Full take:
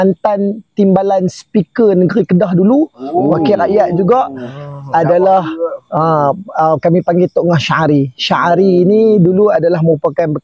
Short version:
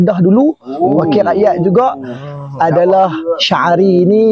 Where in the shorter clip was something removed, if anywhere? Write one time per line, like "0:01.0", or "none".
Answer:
0:03.4